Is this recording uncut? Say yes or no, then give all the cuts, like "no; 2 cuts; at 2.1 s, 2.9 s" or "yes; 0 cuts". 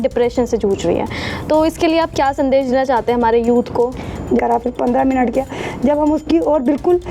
no; 1 cut; at 4.4 s